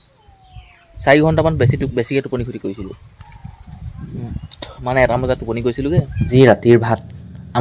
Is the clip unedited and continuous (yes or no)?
no